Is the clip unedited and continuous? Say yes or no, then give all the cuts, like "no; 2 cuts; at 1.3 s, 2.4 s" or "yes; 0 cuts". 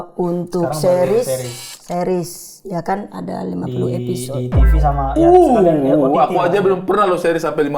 yes; 0 cuts